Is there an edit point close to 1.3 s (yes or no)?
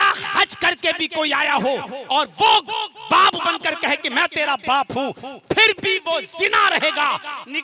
no